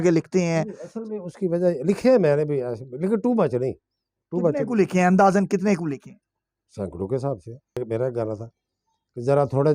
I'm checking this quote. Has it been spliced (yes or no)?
yes